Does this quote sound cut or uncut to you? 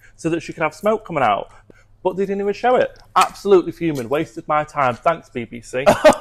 cut